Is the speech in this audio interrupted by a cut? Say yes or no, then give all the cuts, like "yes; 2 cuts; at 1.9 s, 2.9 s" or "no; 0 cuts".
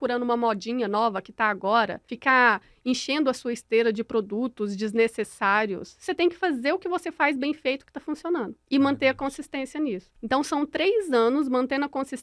yes; 3 cuts; at 2.1 s, 8.6 s, 10.1 s